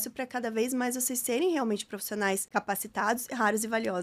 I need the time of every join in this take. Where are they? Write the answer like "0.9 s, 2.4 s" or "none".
2.5 s